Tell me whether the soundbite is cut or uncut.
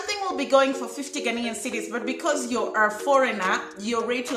uncut